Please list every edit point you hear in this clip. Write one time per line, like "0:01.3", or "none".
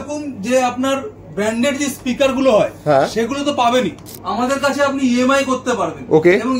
0:04.1